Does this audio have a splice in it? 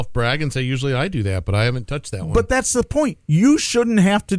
no; 0 cuts

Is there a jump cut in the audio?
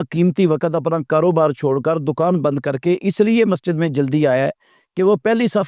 no; 0 cuts

